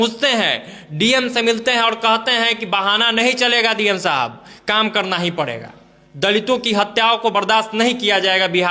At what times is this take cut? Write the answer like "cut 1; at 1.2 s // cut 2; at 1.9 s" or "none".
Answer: none